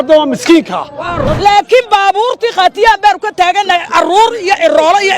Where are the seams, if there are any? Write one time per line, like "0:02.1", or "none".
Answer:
0:01.2